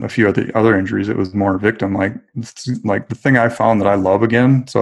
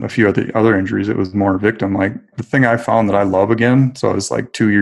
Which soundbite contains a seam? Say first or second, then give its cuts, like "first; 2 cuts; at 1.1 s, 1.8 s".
second; 1 cut; at 2.4 s